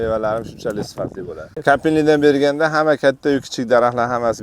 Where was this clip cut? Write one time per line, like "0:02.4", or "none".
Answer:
0:01.5